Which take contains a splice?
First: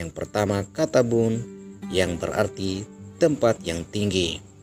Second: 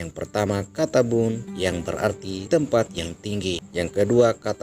second; 2 cuts; at 1.8 s, 3.6 s

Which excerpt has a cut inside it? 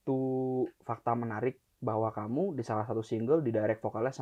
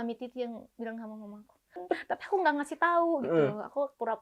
second; 1 cut; at 1.8 s

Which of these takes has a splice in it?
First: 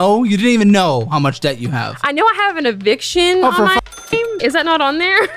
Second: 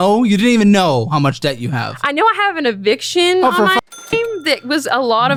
first; 1 cut; at 4.4 s

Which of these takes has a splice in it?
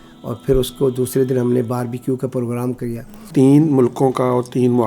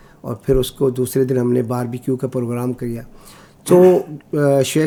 first; 1 cut; at 3.3 s

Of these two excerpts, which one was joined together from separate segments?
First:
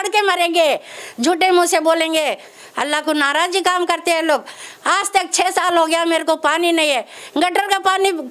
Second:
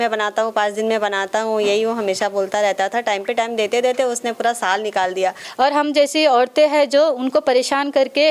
second; 1 cut; at 5.4 s

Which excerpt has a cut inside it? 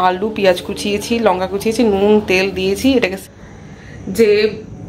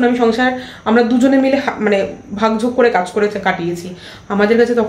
first; 1 cut; at 3.2 s

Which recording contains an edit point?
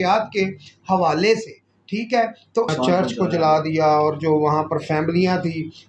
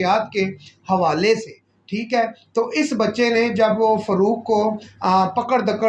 first; 1 cut; at 2.7 s

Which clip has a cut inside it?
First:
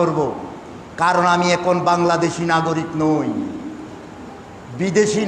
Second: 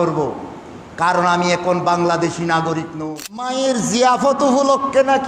second; 1 cut; at 2.9 s

